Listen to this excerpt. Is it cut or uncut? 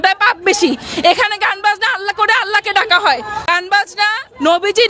cut